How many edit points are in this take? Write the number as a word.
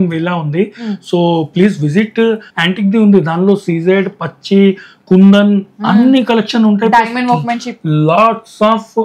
one